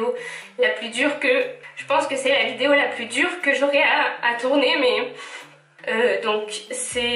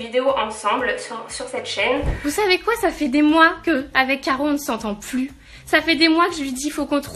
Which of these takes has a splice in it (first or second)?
second